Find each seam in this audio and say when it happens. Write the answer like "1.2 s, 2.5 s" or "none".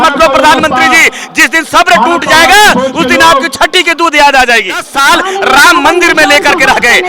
4.9 s